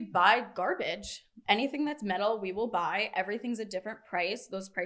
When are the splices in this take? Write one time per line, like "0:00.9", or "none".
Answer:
none